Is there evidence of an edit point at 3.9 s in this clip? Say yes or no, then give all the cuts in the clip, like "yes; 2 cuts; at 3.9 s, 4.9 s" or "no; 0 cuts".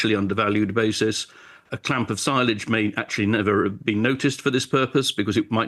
no; 1 cut; at 1.6 s